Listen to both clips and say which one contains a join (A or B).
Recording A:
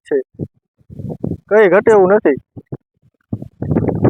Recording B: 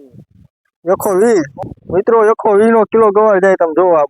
B